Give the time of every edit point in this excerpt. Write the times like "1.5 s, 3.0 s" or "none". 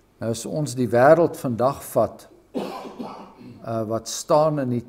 none